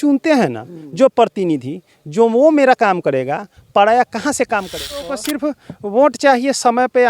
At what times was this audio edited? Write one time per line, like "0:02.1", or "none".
0:05.1